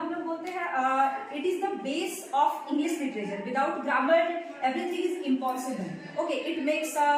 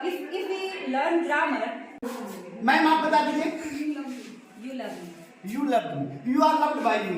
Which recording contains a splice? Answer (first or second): second